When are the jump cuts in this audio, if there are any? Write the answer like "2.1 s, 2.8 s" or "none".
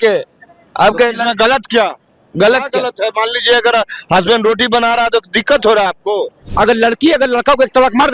6.4 s